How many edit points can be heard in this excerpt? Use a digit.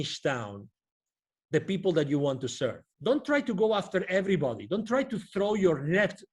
1